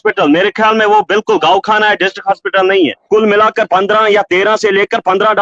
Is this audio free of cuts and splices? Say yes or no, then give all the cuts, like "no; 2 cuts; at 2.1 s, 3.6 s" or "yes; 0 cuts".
no; 1 cut; at 3.1 s